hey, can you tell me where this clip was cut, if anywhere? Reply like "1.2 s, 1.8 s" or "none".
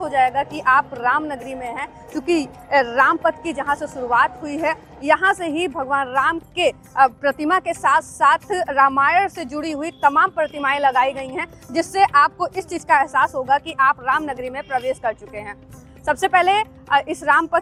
none